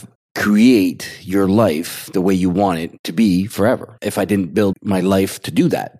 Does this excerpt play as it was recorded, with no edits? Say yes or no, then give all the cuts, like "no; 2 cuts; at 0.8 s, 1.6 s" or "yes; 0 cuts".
yes; 0 cuts